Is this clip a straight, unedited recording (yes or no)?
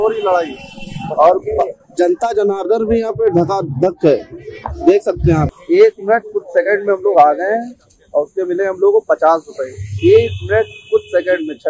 no